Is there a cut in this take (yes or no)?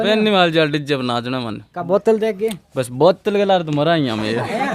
no